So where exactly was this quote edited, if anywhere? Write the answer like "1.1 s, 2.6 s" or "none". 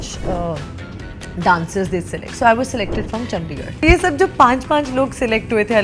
3.8 s